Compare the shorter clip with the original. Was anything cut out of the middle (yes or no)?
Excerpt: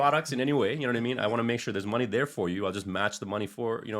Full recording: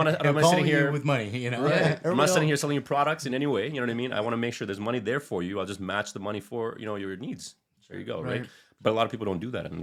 no